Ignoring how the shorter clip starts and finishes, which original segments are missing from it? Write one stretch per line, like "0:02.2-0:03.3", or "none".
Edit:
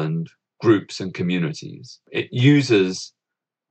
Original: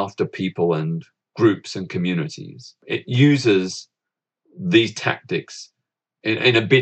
none